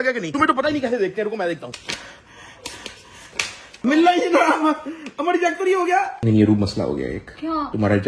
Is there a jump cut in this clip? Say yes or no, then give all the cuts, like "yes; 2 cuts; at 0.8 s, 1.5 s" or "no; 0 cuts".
yes; 3 cuts; at 1.7 s, 3.8 s, 6.1 s